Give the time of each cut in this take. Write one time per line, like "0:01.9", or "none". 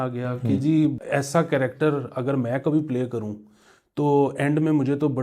0:01.0